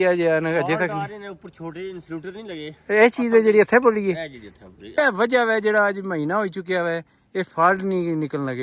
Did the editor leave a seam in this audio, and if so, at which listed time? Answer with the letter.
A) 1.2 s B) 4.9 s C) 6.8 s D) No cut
B